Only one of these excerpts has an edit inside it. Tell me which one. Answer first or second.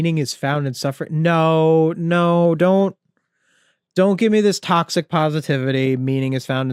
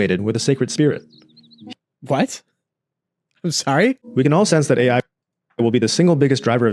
second